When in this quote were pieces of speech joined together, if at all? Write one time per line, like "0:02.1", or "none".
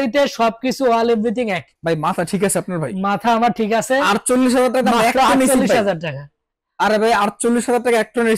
0:01.7